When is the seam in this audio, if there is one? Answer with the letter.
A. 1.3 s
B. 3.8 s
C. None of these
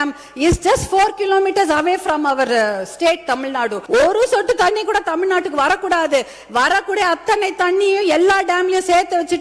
B